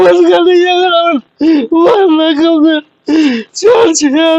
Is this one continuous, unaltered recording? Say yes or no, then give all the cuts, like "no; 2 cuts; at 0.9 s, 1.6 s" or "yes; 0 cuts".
no; 1 cut; at 1.3 s